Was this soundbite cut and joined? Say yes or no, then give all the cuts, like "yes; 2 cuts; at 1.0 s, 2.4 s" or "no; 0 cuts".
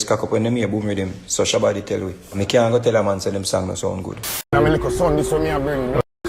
yes; 1 cut; at 4.5 s